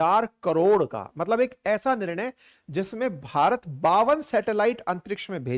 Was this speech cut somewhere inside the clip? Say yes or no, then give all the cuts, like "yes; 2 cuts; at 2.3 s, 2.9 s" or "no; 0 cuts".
no; 0 cuts